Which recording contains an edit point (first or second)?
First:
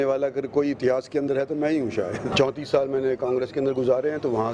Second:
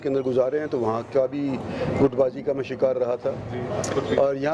first